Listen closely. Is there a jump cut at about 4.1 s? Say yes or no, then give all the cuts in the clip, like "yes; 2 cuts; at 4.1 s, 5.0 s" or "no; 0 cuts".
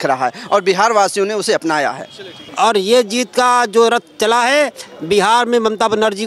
no; 1 cut; at 2.4 s